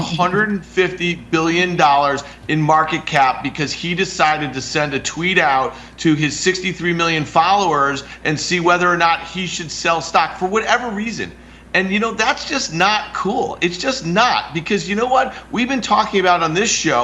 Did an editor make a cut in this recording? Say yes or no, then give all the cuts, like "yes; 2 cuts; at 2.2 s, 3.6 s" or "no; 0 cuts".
no; 0 cuts